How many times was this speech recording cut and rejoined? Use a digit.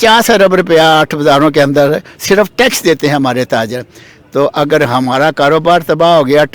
0